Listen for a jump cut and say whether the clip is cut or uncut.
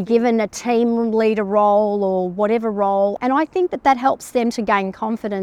cut